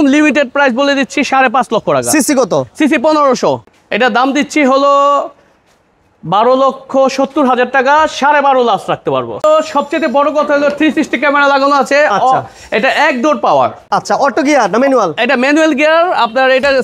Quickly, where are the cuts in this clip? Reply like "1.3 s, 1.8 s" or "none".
3.7 s, 9.4 s, 13.8 s